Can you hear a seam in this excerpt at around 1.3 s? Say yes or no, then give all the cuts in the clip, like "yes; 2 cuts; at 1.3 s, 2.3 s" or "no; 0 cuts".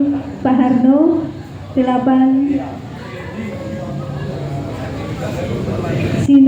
no; 0 cuts